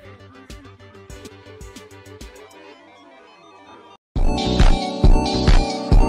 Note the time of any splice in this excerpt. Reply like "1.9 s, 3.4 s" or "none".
none